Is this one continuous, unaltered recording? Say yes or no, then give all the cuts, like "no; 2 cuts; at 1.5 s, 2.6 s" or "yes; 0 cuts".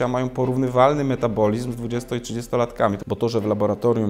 no; 1 cut; at 3.0 s